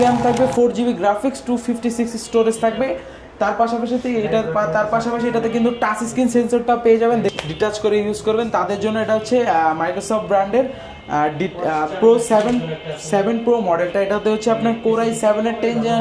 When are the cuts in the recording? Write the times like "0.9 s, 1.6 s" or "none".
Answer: 7.3 s

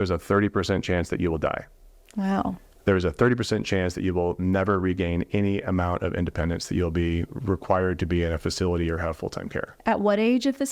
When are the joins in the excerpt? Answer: none

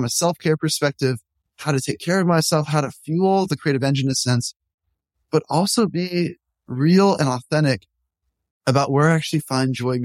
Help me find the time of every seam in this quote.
1.5 s

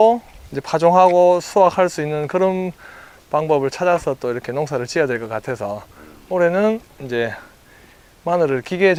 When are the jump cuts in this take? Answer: none

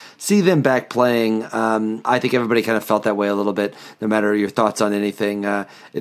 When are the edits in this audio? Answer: 2.0 s

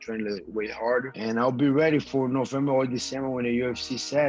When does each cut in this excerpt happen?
1.1 s

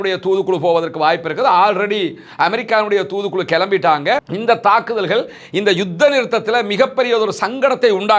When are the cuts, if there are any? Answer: 4.3 s

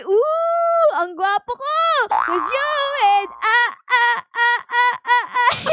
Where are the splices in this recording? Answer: 2.3 s

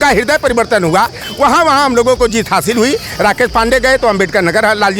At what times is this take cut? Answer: none

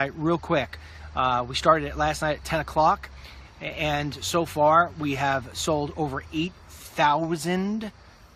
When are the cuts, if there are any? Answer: none

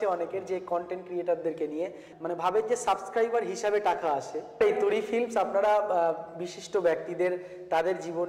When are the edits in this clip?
2.0 s, 4.6 s

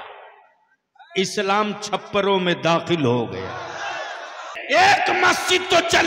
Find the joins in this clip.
4.5 s

